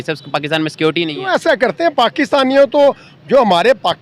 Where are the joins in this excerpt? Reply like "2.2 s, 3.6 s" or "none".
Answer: 1.1 s